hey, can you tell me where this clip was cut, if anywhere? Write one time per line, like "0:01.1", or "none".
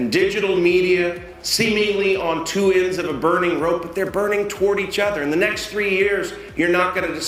none